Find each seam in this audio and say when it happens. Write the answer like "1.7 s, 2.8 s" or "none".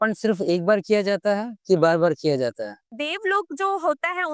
2.8 s